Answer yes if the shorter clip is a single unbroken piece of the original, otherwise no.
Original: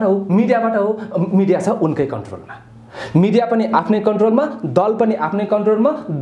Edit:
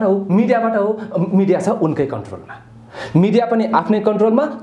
yes